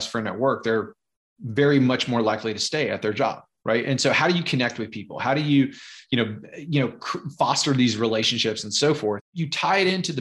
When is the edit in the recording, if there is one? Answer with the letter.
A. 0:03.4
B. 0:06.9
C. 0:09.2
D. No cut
C